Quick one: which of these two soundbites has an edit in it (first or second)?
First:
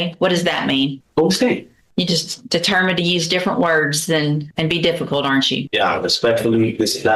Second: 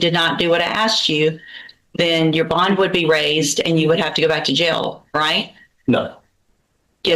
first